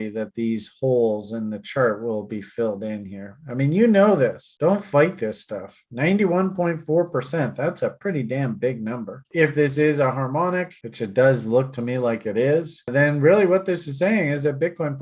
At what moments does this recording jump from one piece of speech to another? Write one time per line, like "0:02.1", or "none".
0:09.3